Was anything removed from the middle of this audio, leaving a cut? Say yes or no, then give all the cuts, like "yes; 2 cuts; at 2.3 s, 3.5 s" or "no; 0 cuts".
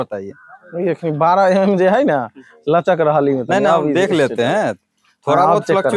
no; 0 cuts